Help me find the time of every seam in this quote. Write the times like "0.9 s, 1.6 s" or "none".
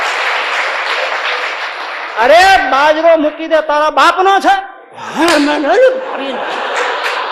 none